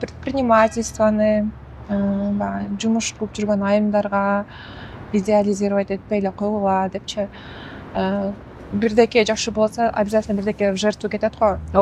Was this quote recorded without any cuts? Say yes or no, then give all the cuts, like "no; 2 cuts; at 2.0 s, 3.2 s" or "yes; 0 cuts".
yes; 0 cuts